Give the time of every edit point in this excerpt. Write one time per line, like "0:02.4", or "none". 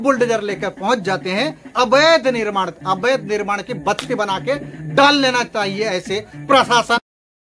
none